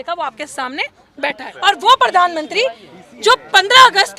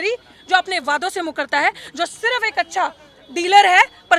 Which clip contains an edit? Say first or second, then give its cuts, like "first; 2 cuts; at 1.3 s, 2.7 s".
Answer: first; 1 cut; at 1.5 s